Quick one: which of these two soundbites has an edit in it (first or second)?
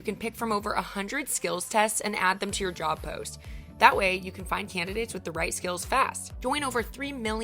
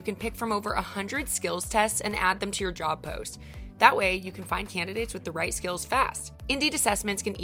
first